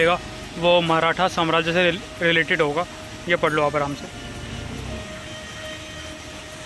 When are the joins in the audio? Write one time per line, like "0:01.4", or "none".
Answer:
none